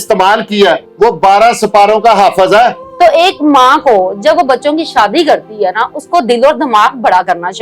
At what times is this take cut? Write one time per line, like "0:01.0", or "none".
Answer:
0:00.9
0:02.8